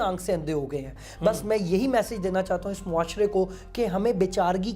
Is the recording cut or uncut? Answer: uncut